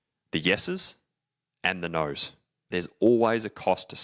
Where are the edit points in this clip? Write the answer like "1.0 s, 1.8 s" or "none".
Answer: 2.7 s